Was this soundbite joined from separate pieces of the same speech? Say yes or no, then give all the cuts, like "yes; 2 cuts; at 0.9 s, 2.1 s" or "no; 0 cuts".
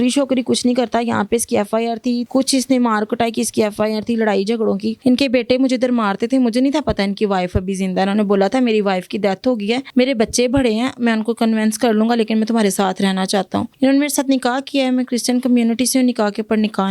yes; 4 cuts; at 2.2 s, 4.9 s, 9.8 s, 13.7 s